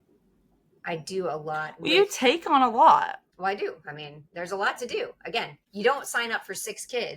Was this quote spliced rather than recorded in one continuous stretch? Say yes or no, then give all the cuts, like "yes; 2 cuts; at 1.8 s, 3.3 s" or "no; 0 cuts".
yes; 2 cuts; at 3.2 s, 5.6 s